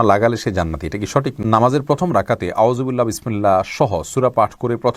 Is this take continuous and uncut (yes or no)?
no